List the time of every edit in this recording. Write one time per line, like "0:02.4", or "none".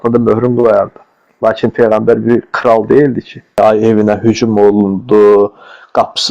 0:03.6